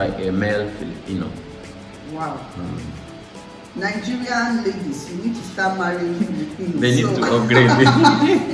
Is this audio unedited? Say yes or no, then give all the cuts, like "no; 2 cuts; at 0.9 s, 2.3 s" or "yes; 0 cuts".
yes; 0 cuts